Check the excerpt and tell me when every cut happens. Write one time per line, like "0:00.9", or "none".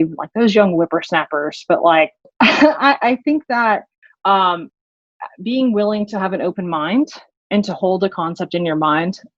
0:02.2